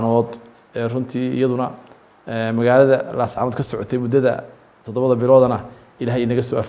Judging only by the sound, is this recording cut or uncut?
uncut